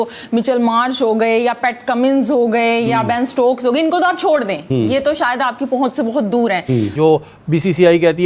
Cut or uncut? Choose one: cut